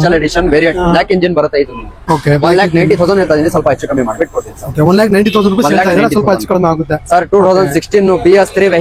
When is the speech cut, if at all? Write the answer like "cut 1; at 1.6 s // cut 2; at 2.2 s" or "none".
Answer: none